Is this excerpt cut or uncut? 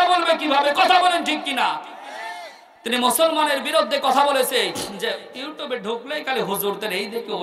uncut